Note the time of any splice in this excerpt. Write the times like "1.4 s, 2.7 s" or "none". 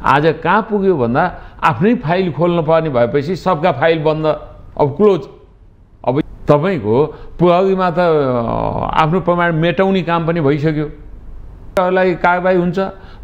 6.2 s, 11.7 s